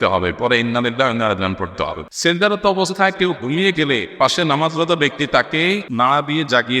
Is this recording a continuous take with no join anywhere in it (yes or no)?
no